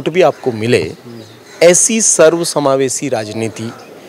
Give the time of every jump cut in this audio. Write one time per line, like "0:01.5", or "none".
none